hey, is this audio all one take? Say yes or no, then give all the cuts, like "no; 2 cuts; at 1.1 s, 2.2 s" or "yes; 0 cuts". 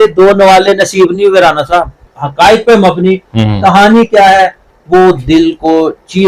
no; 1 cut; at 2.0 s